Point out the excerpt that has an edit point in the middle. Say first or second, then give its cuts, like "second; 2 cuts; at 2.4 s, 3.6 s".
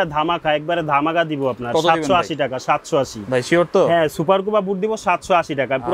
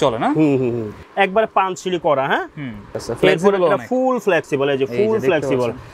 second; 2 cuts; at 1.0 s, 2.8 s